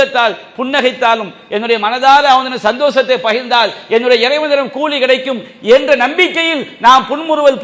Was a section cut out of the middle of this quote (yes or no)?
no